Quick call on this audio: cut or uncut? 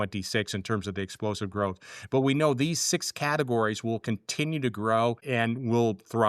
cut